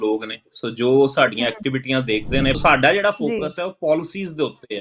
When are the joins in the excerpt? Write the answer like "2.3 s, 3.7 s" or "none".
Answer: 2.6 s